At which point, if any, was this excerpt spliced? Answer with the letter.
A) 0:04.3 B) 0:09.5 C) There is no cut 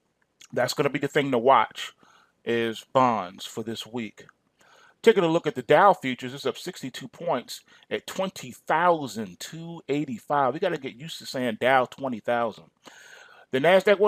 C